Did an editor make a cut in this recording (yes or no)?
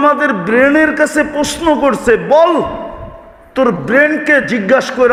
no